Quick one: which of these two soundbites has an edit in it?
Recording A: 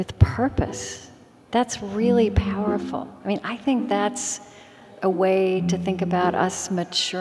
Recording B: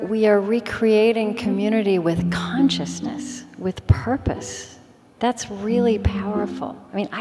A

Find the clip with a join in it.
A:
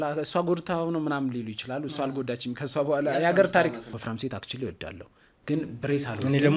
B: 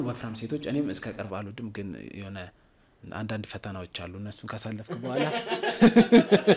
A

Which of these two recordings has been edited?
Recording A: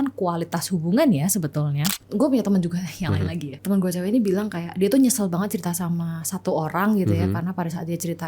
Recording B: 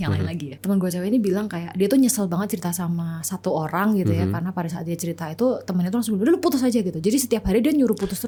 A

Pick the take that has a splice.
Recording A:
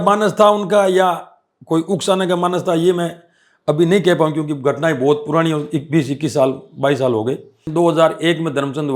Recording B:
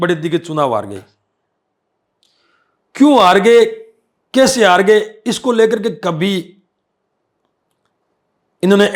A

